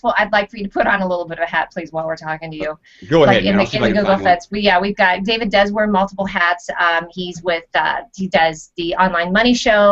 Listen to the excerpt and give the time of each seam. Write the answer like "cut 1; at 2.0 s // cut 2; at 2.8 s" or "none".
cut 1; at 2.2 s

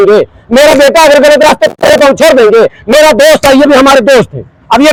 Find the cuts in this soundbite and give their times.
none

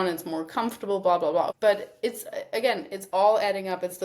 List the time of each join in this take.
cut 1; at 1.5 s

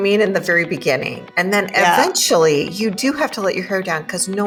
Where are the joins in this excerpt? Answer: none

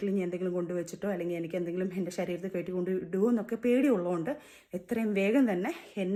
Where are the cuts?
none

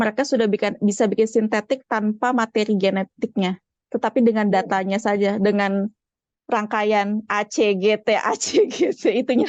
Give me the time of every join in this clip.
none

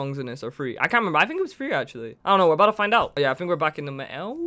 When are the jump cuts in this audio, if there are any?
cut 1; at 3.1 s

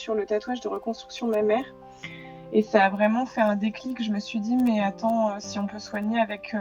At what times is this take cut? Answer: none

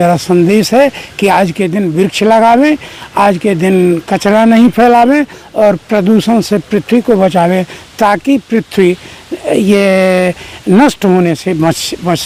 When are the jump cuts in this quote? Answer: none

